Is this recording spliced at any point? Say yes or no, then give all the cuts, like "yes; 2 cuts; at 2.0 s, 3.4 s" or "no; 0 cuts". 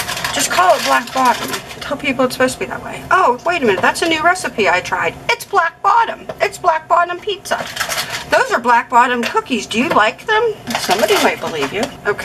no; 0 cuts